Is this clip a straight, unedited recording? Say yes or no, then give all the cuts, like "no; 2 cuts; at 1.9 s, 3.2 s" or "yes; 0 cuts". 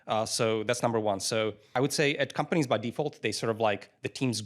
no; 1 cut; at 1.6 s